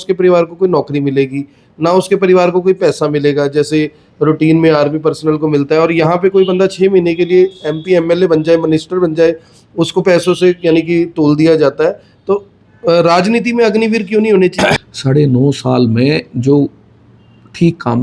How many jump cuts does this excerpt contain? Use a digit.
1